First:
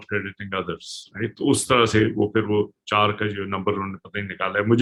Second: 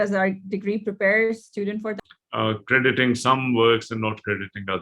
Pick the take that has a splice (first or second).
second